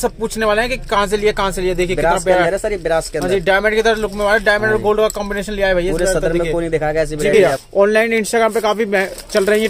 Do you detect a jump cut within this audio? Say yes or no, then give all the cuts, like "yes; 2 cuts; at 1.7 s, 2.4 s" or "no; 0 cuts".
yes; 1 cut; at 7.6 s